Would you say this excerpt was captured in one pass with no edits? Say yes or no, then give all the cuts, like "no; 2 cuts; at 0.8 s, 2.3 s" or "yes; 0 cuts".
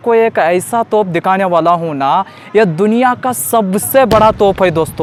yes; 0 cuts